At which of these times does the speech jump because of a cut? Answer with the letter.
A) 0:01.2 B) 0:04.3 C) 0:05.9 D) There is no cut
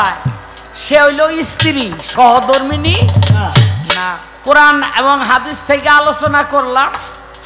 B